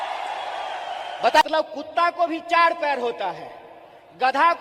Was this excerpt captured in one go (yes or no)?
no